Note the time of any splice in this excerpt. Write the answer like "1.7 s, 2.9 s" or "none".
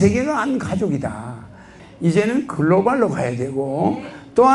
1.8 s